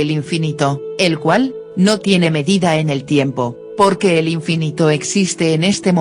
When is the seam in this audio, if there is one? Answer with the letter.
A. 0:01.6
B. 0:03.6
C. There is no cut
A